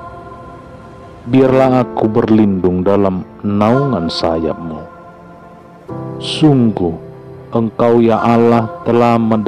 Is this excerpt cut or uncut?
uncut